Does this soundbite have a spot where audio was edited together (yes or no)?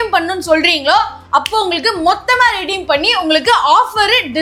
no